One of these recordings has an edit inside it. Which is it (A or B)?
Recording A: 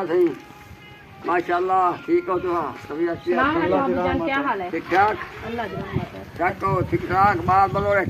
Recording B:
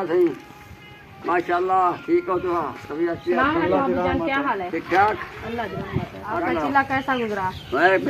B